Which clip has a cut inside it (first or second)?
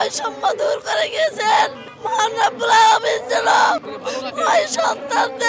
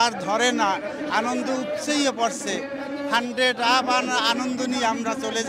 first